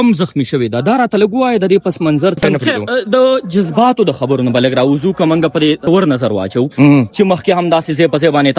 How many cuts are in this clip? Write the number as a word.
two